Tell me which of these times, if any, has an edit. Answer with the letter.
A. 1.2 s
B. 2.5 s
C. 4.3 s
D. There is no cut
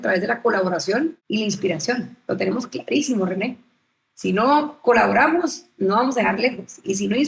A